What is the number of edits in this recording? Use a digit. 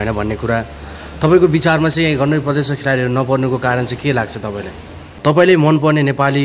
1